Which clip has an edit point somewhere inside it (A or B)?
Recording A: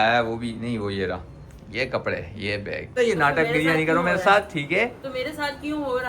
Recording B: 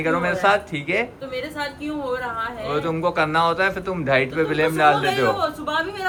A